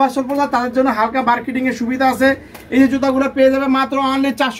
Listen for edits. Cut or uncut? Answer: uncut